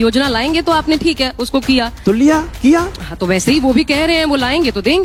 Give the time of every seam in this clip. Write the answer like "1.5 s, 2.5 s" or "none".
none